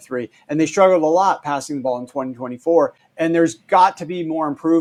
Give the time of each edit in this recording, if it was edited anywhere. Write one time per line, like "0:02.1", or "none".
none